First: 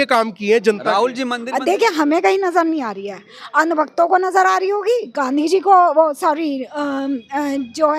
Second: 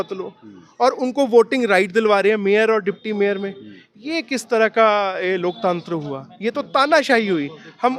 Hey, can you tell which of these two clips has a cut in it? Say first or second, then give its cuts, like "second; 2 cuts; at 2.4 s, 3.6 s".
first; 1 cut; at 1.3 s